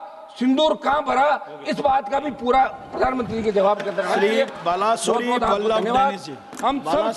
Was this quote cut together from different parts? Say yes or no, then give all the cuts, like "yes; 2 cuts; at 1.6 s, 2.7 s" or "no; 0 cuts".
no; 0 cuts